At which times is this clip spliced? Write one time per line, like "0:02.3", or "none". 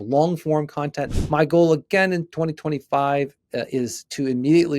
0:01.2